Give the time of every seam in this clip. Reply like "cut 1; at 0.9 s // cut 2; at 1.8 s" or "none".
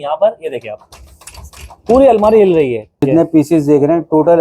cut 1; at 3.0 s